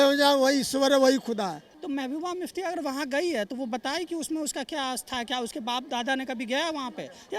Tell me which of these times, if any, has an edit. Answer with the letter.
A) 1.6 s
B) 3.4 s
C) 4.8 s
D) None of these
A